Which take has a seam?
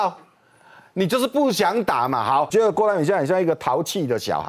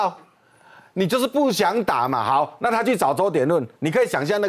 first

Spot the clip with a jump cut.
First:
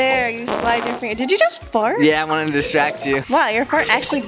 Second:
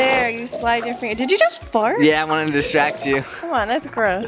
first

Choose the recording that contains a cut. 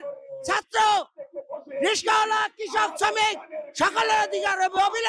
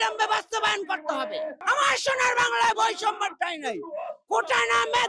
second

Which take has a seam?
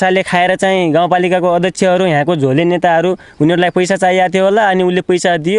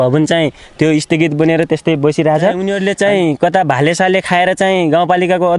second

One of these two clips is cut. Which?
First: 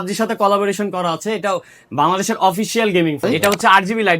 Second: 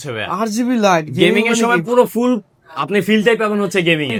first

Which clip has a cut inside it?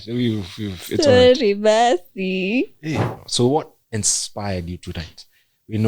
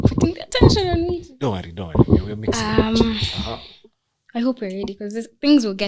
first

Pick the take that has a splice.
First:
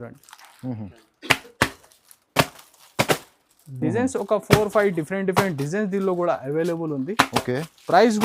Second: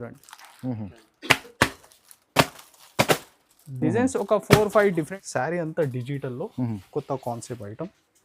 second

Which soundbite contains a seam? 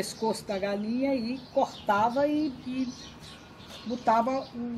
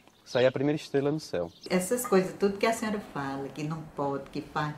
second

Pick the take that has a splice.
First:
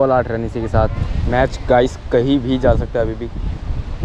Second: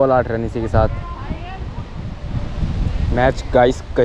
first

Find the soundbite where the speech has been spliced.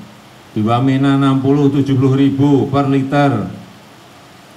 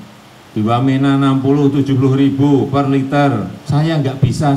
second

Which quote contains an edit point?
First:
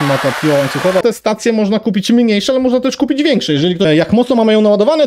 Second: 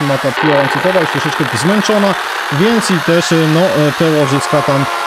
first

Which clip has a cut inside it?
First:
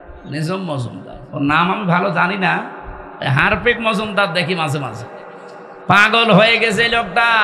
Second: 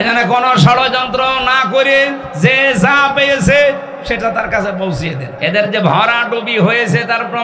second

